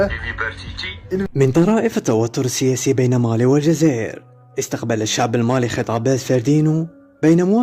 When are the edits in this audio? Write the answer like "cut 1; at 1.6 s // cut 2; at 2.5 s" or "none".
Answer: cut 1; at 1.2 s